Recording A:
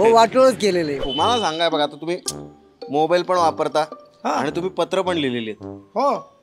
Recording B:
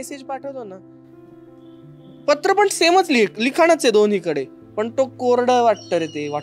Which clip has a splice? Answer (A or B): A